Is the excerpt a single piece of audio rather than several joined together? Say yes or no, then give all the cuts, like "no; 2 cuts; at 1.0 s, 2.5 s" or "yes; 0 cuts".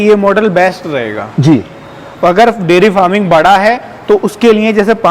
yes; 0 cuts